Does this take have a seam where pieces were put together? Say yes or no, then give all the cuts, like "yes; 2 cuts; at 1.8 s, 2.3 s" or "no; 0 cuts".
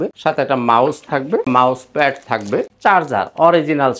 no; 0 cuts